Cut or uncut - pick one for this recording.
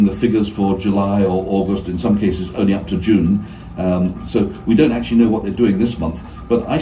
uncut